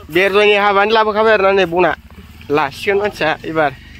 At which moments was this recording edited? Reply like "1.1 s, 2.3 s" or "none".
none